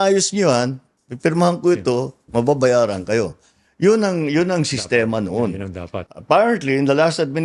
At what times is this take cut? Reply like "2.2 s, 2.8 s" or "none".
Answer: none